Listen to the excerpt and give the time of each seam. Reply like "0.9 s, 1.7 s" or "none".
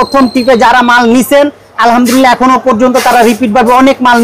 none